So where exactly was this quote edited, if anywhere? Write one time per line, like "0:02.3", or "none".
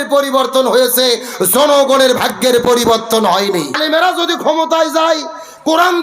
0:03.7